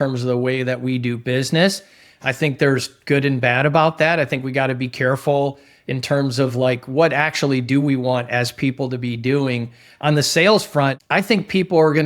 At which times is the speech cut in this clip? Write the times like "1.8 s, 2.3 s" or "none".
11.0 s